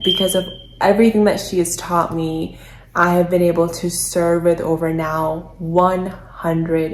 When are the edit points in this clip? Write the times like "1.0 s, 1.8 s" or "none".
none